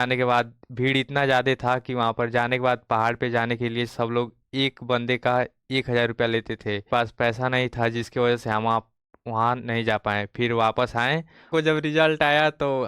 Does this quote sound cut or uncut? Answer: cut